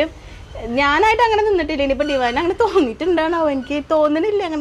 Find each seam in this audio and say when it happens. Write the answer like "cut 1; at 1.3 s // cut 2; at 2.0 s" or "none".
none